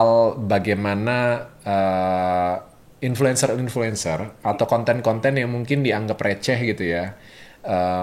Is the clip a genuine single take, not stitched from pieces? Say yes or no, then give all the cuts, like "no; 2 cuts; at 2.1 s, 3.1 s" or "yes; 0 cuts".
yes; 0 cuts